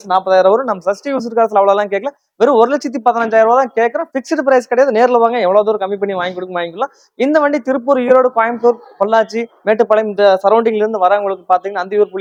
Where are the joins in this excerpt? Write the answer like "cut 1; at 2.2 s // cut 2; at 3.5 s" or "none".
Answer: none